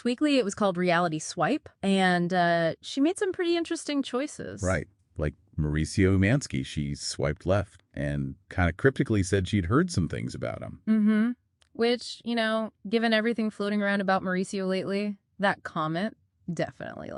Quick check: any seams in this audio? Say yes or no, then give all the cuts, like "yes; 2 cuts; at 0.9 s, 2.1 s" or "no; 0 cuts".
no; 0 cuts